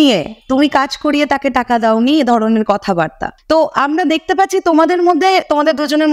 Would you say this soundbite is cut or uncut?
cut